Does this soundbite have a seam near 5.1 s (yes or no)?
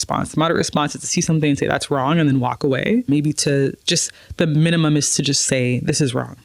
no